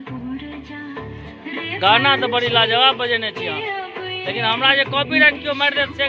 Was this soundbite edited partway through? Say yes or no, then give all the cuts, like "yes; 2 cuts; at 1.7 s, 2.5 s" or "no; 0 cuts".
no; 0 cuts